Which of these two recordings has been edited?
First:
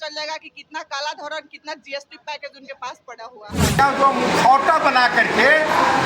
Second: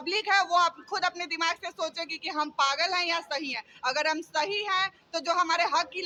first; 1 cut; at 3.8 s

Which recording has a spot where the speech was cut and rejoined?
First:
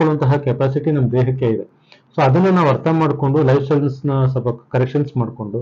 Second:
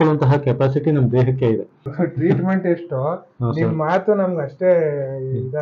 second; 1 cut; at 1.9 s

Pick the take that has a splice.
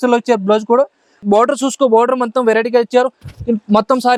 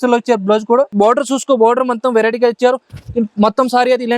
second; 1 cut; at 0.9 s

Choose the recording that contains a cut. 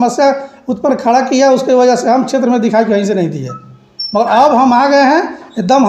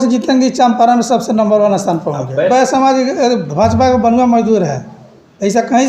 second; 1 cut; at 2.5 s

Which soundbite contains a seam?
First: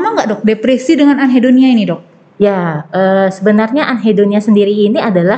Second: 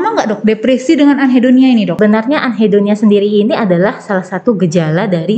second; 1 cut; at 1.9 s

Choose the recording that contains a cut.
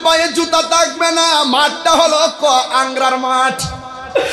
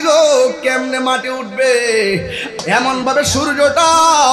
second; 1 cut; at 2.6 s

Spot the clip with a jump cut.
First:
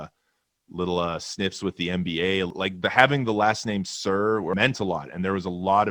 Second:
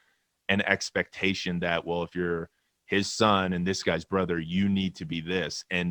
first; 2 cuts; at 2.5 s, 4.5 s

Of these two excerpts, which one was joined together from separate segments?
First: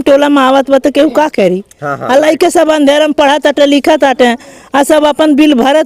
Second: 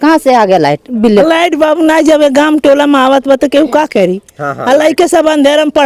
second; 1 cut; at 1.2 s

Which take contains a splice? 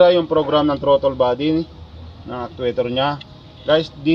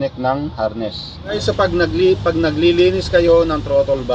second; 1 cut; at 1.4 s

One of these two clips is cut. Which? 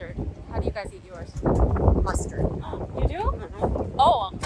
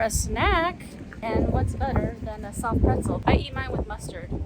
second; 2 cuts; at 1.2 s, 3.2 s

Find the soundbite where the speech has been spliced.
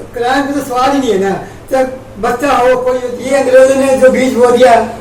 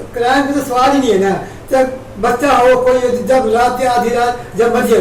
first; 1 cut; at 3.1 s

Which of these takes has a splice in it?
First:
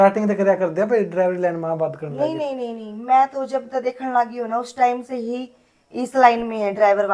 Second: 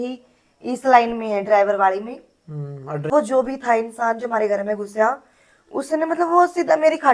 second; 1 cut; at 3.1 s

